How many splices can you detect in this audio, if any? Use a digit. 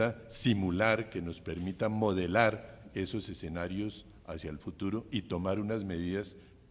1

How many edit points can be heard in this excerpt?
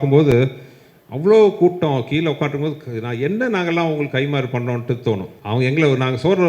1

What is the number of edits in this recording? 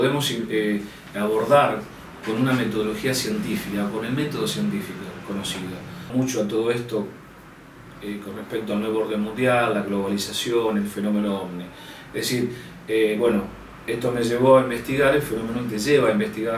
1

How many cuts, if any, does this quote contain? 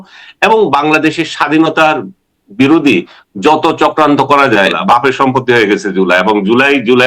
1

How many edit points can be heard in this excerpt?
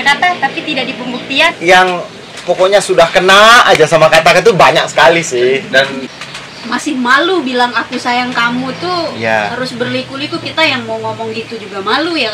3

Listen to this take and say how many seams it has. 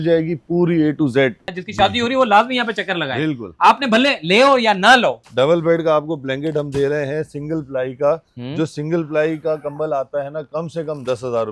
2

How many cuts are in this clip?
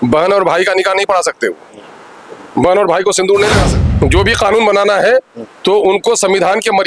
1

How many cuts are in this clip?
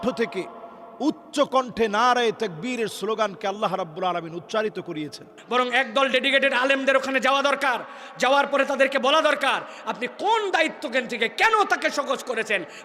1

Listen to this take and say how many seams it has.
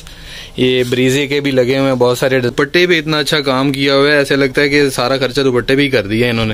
1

